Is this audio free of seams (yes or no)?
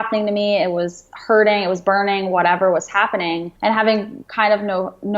no